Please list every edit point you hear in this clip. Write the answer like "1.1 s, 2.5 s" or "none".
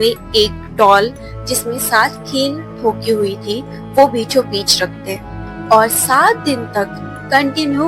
none

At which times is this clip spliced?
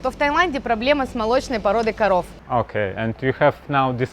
2.4 s

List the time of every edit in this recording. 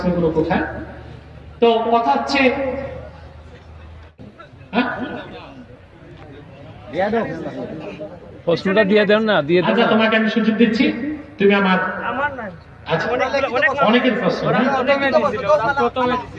4.1 s

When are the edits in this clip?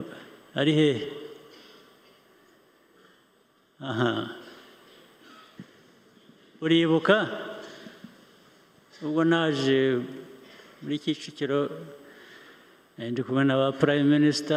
5.6 s

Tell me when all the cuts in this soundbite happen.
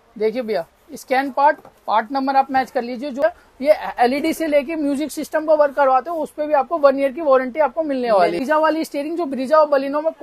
3.2 s, 8.4 s

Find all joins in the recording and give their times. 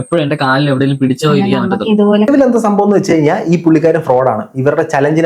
2.3 s

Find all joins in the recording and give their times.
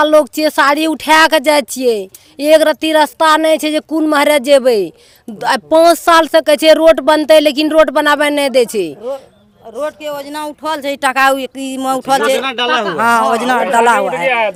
none

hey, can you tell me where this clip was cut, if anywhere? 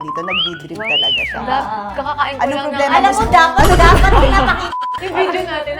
4.7 s

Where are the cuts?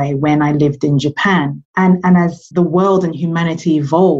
1.6 s, 2.4 s

